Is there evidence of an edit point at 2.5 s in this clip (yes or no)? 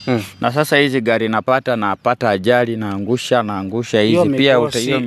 no